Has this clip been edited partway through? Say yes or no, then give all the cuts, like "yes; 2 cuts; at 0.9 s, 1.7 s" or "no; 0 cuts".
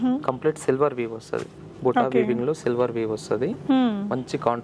no; 0 cuts